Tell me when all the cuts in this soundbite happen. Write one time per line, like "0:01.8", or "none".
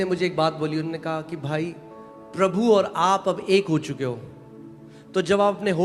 none